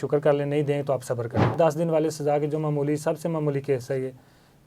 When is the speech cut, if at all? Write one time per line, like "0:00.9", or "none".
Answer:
0:01.5

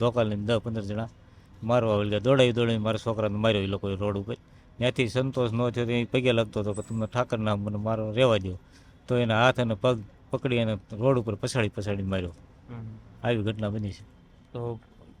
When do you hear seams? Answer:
none

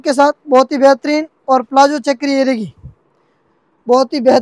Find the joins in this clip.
none

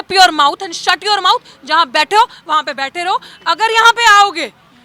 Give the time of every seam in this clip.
none

